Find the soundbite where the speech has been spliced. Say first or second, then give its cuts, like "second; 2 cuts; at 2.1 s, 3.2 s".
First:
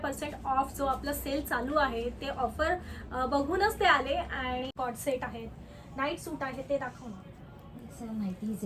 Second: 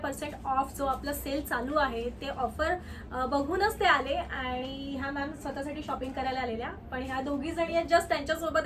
first; 1 cut; at 4.7 s